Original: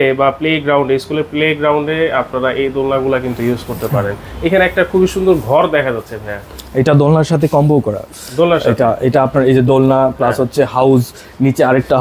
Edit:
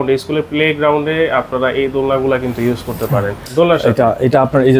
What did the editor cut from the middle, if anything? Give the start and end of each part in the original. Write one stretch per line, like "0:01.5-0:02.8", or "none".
0:04.2-0:08.2